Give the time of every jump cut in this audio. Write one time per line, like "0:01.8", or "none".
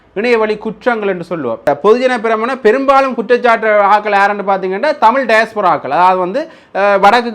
0:01.6